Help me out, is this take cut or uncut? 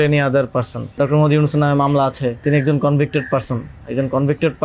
cut